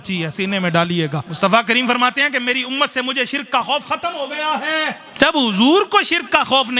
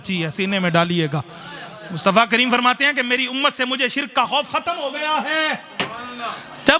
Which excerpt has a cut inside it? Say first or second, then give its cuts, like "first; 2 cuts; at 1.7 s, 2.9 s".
first; 2 cuts; at 1.2 s, 5.0 s